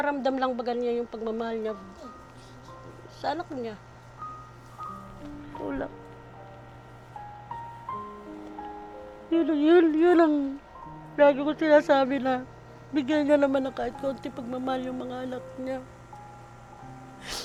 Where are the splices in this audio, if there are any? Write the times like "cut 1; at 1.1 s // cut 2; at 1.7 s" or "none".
none